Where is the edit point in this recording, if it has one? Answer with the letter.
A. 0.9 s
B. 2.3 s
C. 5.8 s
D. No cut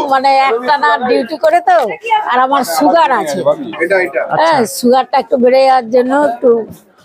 B